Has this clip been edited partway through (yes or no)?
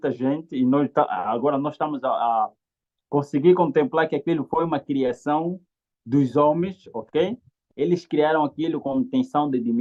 no